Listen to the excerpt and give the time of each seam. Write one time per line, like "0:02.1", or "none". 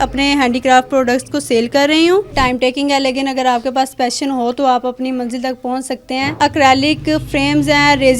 0:02.3
0:06.4